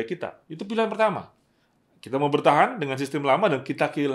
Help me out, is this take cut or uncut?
uncut